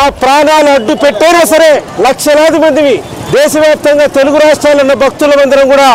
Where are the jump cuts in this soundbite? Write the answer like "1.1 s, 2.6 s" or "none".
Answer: 1.9 s